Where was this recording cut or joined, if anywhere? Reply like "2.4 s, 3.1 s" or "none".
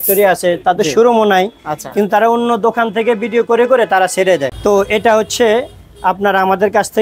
4.5 s